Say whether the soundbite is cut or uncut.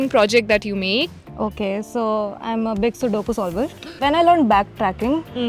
cut